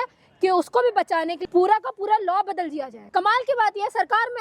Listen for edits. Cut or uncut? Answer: cut